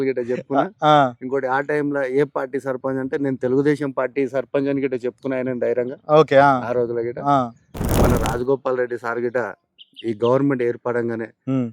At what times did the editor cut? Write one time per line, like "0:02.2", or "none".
0:07.9